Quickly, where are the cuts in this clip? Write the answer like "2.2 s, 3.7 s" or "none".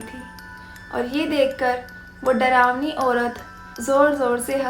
3.8 s